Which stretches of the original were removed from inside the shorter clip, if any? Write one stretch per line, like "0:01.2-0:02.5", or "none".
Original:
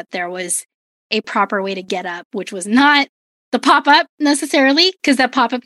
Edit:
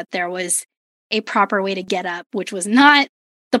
none